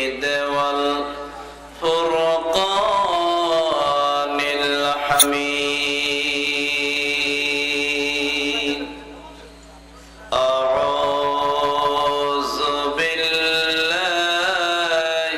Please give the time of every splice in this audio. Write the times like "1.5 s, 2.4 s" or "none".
5.2 s